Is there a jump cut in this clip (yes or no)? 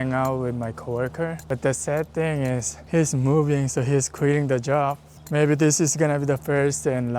yes